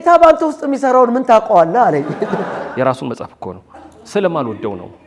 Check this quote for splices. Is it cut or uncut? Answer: cut